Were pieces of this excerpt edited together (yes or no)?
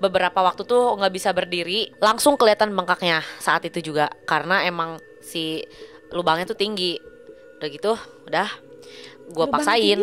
yes